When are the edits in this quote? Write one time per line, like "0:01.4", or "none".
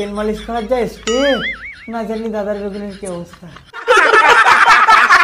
0:03.8